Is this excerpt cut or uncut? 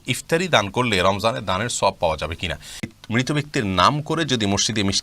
cut